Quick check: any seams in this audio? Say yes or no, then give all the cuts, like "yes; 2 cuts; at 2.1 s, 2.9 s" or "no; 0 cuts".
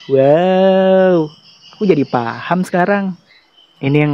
no; 0 cuts